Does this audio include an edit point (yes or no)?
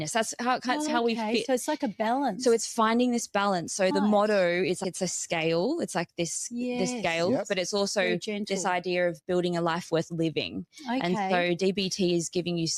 yes